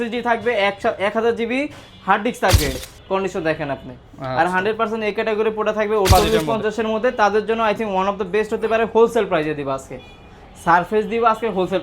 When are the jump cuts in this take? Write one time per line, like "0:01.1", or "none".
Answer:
0:02.8
0:06.1